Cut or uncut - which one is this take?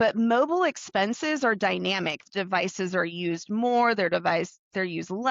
cut